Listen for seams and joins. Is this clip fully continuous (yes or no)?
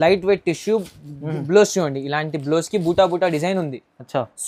yes